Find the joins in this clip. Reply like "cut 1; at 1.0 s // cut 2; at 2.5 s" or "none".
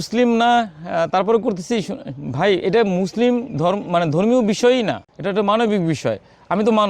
none